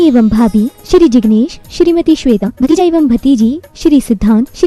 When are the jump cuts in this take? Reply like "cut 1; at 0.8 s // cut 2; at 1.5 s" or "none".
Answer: cut 1; at 2.8 s